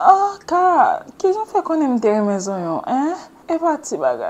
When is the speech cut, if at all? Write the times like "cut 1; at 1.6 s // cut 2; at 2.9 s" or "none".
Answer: cut 1; at 3.3 s